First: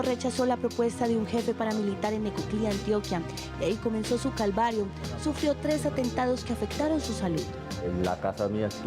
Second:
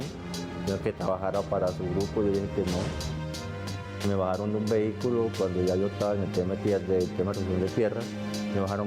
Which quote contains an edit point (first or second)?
first